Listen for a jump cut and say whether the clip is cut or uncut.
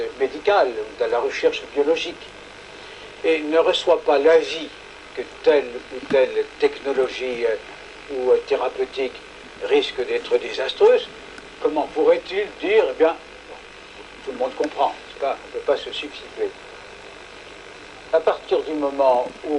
cut